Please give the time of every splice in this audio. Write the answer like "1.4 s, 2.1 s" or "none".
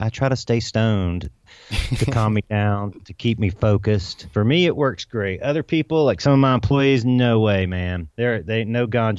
4.2 s, 8.0 s